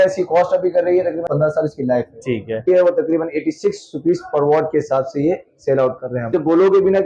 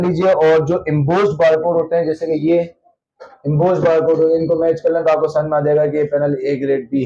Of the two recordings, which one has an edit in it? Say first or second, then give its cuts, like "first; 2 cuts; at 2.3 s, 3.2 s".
first; 3 cuts; at 1.3 s, 2.7 s, 6.3 s